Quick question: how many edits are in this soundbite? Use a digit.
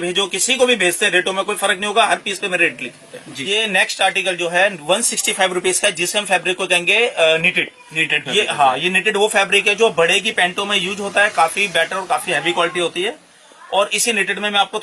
0